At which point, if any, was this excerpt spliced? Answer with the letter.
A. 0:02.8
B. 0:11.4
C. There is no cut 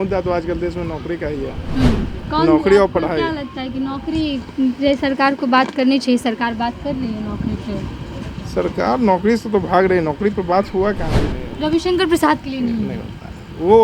B